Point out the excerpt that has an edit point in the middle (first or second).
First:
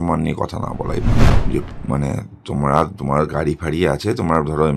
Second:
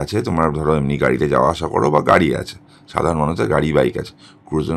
first